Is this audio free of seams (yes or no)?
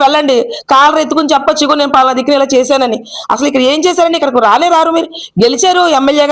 yes